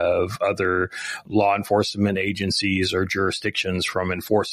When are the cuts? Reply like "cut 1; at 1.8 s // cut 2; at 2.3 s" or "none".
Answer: none